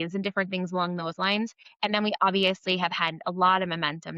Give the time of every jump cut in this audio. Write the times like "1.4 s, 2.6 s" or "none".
1.6 s